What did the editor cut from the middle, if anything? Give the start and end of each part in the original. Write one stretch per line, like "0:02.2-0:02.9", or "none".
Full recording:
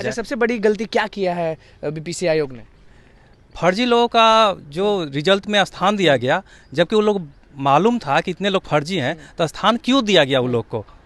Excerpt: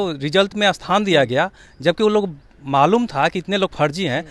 none

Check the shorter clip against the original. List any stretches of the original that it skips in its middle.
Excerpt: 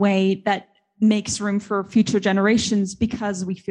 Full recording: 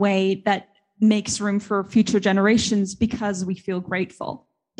none

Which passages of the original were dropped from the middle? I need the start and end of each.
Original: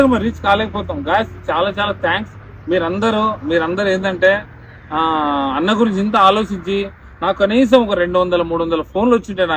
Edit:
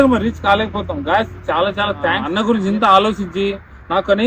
0:02.2-0:05.6

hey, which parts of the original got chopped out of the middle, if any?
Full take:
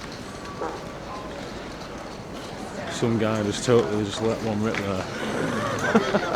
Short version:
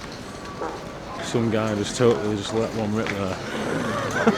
0:01.2-0:02.9

